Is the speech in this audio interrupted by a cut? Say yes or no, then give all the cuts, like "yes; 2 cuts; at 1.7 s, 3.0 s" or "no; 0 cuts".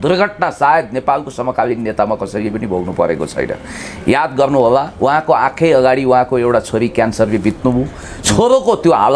no; 0 cuts